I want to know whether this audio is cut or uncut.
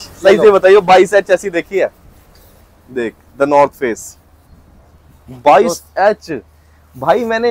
uncut